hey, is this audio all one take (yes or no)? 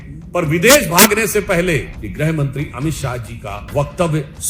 no